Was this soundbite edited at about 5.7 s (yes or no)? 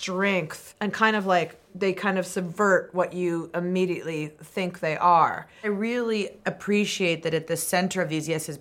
yes